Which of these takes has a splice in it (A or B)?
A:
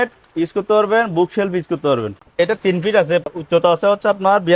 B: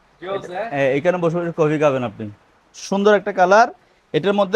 A